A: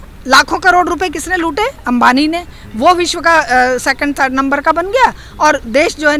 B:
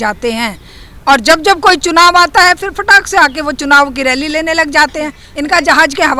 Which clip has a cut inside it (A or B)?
B